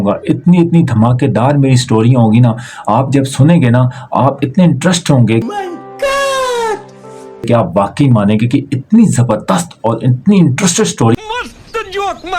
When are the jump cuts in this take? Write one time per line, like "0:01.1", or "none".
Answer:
0:11.2